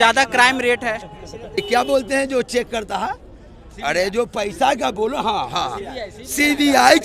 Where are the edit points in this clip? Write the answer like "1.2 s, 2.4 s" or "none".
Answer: 1.6 s